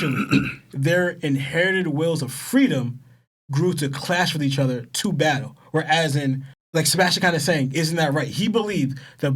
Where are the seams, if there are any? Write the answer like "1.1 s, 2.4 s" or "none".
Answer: none